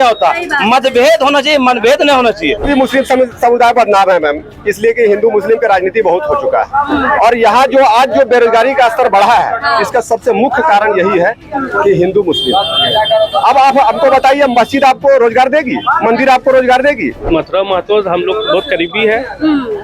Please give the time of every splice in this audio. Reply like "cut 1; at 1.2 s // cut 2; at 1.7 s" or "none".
cut 1; at 2.7 s // cut 2; at 17.1 s